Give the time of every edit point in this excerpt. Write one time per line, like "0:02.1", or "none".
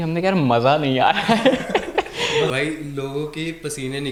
none